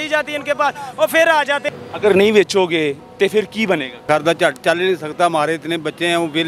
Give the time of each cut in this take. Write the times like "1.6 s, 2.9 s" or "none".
1.7 s, 4.0 s